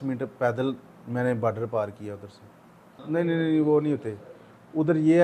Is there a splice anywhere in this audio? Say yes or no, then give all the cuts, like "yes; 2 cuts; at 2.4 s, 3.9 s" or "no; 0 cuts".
no; 0 cuts